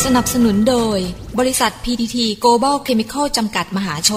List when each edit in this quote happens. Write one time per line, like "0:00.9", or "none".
none